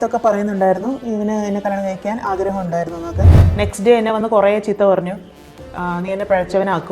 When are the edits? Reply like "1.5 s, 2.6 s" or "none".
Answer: 3.4 s